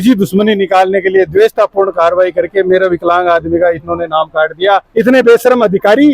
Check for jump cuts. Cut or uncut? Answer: cut